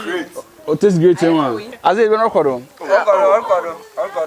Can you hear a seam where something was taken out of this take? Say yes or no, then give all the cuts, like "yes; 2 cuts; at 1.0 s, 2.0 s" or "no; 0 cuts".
yes; 1 cut; at 1.7 s